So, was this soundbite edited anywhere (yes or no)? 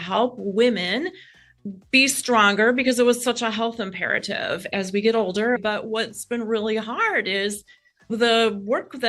yes